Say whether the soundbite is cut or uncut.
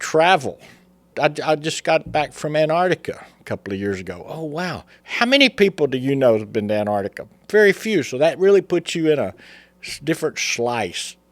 cut